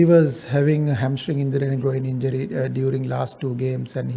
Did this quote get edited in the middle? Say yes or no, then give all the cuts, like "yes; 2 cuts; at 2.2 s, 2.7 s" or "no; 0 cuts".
no; 0 cuts